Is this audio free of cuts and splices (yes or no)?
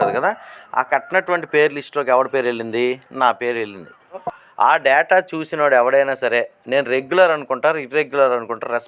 no